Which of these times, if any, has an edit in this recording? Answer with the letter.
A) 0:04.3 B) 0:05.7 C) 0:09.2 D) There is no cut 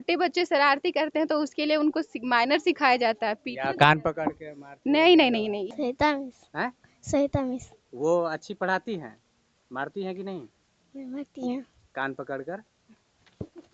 B